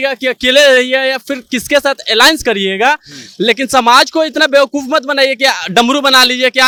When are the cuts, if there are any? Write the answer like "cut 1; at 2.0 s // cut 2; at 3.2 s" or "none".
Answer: none